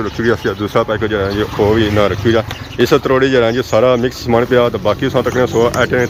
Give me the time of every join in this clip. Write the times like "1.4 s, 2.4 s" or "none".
none